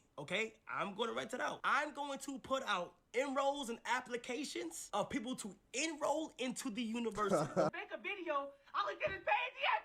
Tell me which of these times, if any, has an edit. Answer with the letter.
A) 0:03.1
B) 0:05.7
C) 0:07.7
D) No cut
C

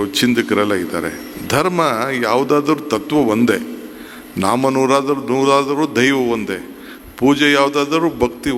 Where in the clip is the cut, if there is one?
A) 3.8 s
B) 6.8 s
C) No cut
C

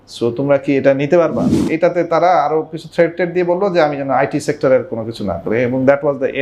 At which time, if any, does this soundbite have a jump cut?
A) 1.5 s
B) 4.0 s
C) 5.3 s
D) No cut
A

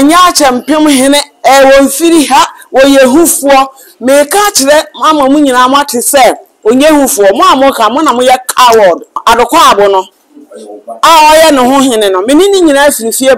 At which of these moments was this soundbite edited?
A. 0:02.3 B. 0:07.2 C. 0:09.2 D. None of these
C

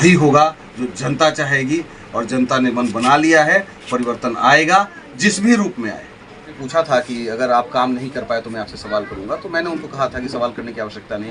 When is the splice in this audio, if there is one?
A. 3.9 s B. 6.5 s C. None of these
B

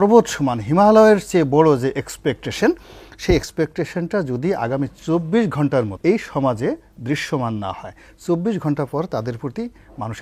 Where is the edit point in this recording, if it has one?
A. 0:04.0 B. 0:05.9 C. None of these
B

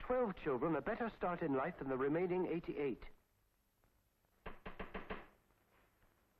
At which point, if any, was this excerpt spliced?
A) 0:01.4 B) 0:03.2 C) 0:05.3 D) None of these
C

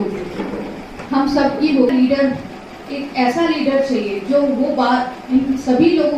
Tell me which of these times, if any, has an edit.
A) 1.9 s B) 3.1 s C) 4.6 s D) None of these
A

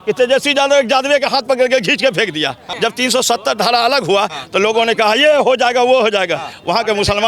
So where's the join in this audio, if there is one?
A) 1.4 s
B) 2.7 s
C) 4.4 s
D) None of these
B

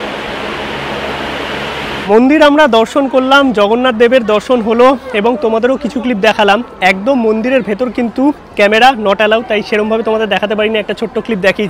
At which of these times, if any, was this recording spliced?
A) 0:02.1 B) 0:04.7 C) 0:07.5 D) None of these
A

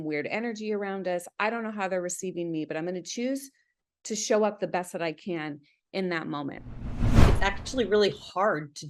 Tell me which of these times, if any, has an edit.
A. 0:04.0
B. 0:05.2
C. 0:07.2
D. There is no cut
C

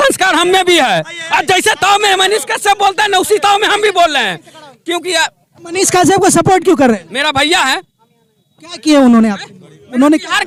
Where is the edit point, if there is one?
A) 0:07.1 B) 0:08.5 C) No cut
C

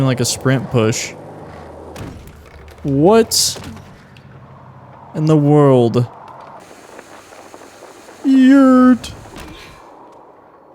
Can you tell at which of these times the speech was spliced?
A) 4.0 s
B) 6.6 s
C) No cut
B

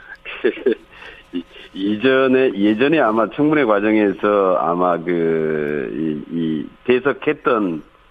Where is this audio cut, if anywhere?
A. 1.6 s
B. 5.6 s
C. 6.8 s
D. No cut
A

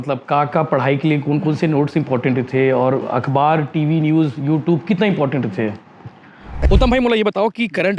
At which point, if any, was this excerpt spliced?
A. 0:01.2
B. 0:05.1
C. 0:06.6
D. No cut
C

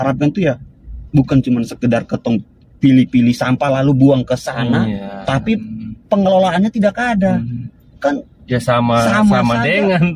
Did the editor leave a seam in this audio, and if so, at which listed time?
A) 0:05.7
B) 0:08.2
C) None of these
C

